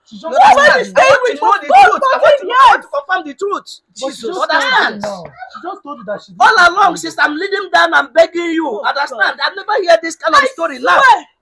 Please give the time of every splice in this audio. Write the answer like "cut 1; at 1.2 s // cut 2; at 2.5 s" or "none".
none